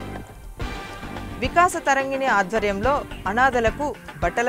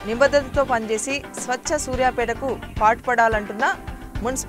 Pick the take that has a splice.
first; 1 cut; at 1.4 s

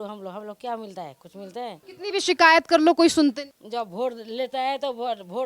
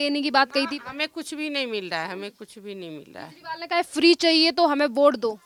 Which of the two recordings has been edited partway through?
first; 2 cuts; at 1.9 s, 3.5 s

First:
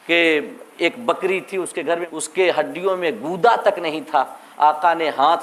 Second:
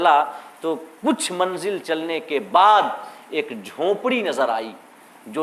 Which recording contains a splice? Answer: first; 1 cut; at 2.1 s

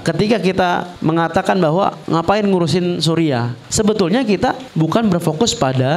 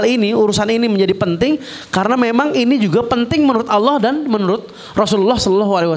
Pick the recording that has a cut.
first; 4 cuts; at 0.9 s, 2.0 s, 3.6 s, 4.7 s

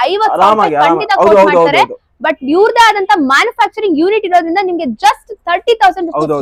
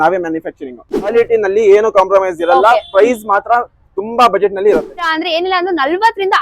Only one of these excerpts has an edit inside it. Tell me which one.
second; 2 cuts; at 1.1 s, 5.2 s

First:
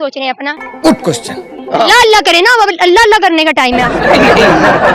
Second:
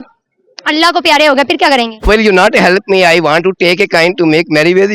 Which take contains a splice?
second; 1 cut; at 2.0 s

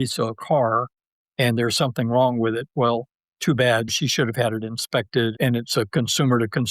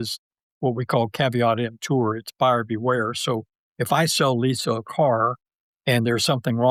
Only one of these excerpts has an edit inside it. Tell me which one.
first; 2 cuts; at 3.9 s, 5.3 s

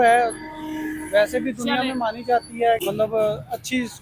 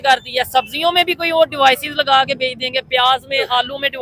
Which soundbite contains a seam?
first; 1 cut; at 2.8 s

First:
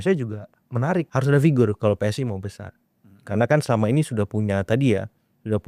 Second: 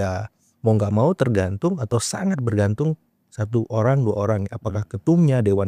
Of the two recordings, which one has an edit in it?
first; 1 cut; at 1.1 s

